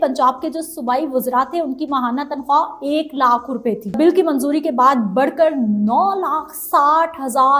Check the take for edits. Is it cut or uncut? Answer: cut